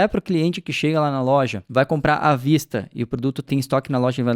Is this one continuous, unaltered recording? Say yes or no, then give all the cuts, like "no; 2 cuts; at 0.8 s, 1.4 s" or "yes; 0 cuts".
no; 2 cuts; at 1.6 s, 3.5 s